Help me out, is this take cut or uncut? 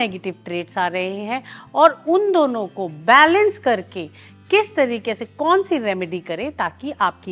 uncut